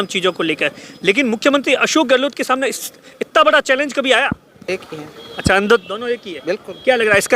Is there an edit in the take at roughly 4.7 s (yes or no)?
yes